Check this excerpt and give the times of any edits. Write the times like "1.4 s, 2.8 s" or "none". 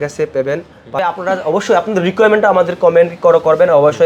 1.0 s